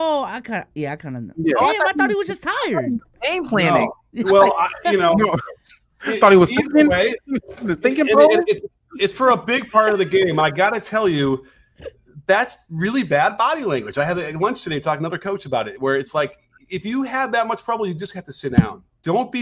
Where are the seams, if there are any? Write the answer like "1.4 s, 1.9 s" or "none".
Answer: none